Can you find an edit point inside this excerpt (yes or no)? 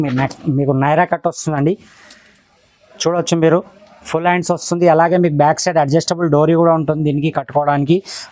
no